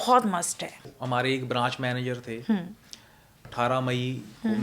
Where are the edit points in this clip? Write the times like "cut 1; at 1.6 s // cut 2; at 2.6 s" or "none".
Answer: cut 1; at 0.9 s // cut 2; at 3.4 s